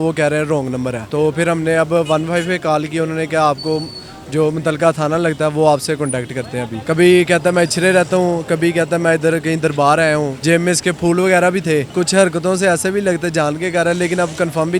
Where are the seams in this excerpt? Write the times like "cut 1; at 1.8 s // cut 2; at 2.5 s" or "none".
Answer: cut 1; at 1.0 s // cut 2; at 6.7 s // cut 3; at 10.3 s // cut 4; at 11.9 s